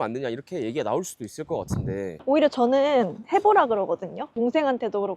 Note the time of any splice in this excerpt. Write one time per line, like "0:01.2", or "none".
0:04.2